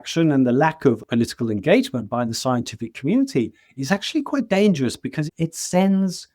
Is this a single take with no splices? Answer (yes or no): no